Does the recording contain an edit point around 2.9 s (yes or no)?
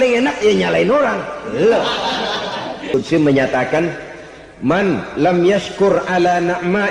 yes